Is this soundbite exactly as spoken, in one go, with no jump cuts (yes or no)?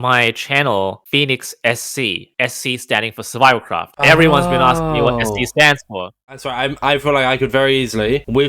no